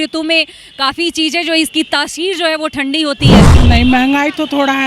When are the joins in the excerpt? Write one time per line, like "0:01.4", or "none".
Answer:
0:03.5